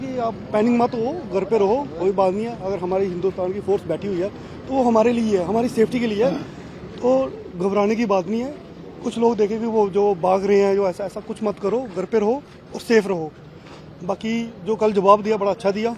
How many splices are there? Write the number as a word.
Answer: zero